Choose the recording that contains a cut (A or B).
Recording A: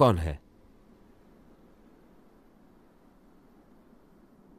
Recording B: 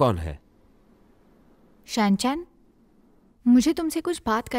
B